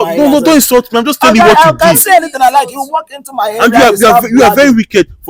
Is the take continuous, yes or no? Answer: yes